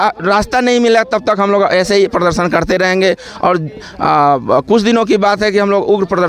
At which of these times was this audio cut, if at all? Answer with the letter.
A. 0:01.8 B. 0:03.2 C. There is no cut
C